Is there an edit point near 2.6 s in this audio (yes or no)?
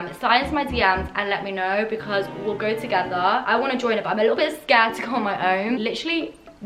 no